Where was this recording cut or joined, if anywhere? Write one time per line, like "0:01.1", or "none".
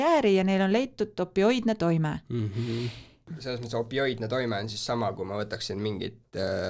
0:03.2